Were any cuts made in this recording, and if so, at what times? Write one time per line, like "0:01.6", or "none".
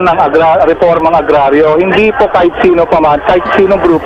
none